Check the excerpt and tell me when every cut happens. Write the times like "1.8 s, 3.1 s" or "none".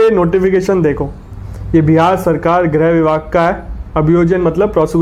none